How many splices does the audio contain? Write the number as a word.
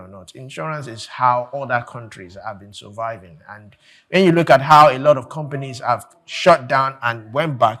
zero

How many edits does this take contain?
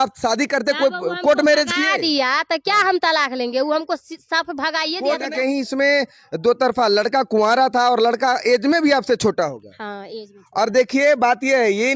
one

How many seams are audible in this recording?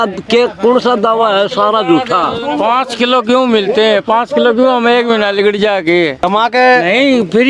two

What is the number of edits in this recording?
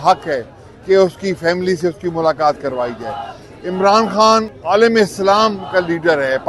one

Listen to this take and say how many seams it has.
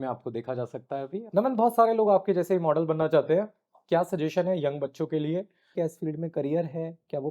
two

